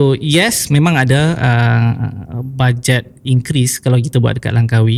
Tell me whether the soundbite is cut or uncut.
uncut